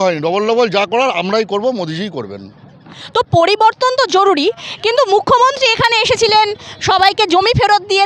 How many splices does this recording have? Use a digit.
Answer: 0